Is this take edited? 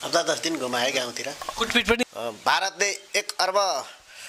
yes; 1 cut; at 2.0 s

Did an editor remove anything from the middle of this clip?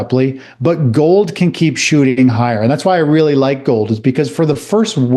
no; 0 cuts

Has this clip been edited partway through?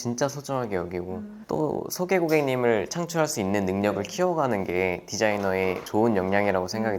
yes; 1 cut; at 5.8 s

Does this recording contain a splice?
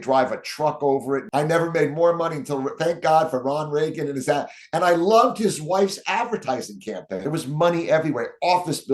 yes; 2 cuts; at 1.2 s, 7.2 s

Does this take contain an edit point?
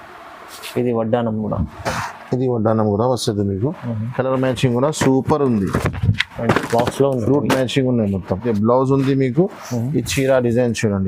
yes; 1 cut; at 8.4 s

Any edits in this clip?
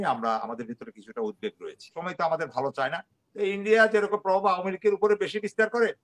yes; 1 cut; at 2.0 s

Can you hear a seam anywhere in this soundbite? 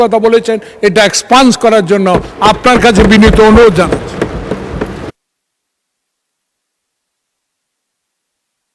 no; 0 cuts

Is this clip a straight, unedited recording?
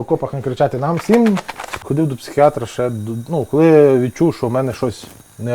no; 1 cut; at 1.8 s

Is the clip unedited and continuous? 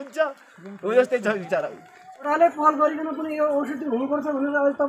no; 1 cut; at 1.9 s

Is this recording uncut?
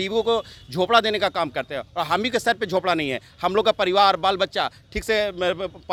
yes; 0 cuts

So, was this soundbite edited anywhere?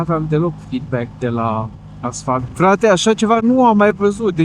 yes; 1 cut; at 2.4 s

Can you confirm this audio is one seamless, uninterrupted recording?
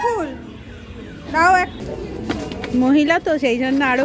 no; 1 cut; at 2.2 s

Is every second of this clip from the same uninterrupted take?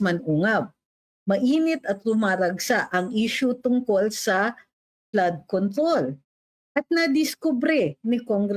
yes; 0 cuts

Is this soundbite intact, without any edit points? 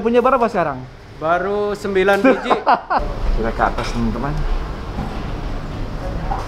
no; 1 cut; at 3.1 s

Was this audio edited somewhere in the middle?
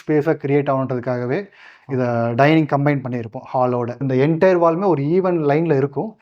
yes; 1 cut; at 4.1 s

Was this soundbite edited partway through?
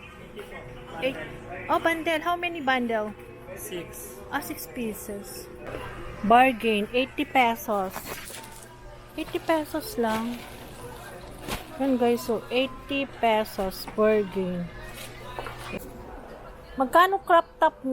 yes; 2 cuts; at 5.7 s, 15.8 s

